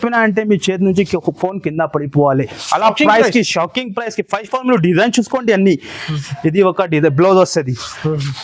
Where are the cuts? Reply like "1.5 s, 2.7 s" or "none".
none

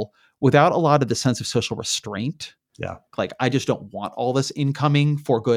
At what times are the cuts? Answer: 3.1 s

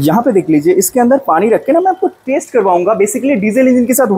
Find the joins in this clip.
none

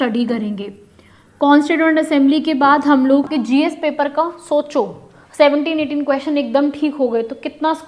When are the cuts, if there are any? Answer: 3.3 s

